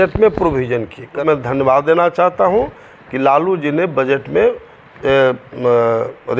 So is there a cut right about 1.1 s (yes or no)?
yes